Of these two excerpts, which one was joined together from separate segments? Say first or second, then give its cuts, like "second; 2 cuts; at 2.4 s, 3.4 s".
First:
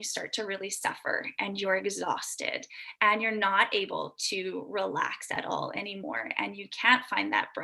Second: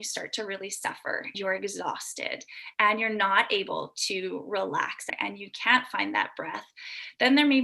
second; 2 cuts; at 1.3 s, 5.0 s